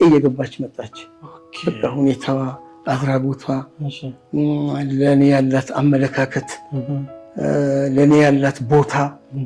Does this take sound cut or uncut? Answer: uncut